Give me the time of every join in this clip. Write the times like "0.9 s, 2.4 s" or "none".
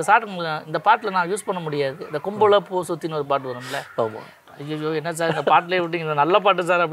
4.4 s